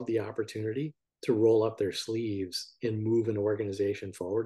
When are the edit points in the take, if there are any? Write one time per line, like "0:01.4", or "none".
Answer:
0:01.0

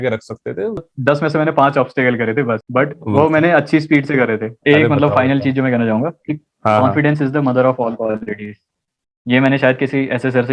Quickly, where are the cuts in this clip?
0:00.9
0:02.6
0:04.5

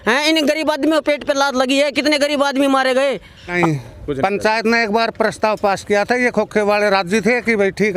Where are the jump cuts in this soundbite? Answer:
0:03.6

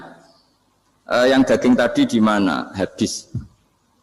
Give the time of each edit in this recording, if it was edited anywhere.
none

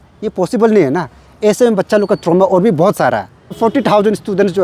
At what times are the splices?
0:03.6

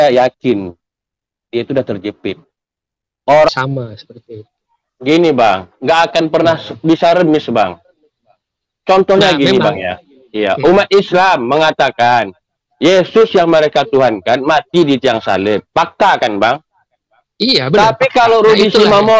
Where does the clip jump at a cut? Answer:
0:03.5

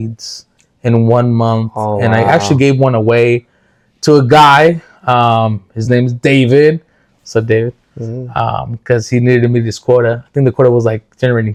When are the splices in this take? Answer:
none

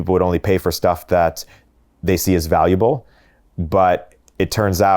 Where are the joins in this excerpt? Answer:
0:01.6

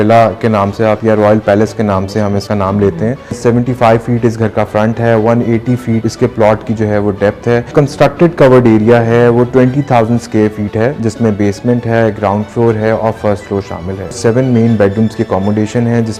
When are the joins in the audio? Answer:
0:02.4
0:03.4
0:06.0
0:07.7
0:14.2

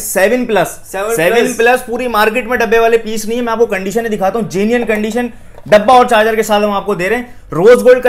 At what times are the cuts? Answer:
none

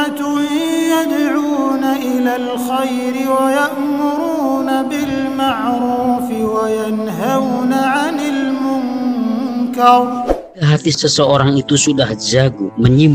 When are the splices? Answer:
0:10.6

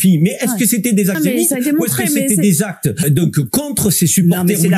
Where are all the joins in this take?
0:01.2
0:03.0

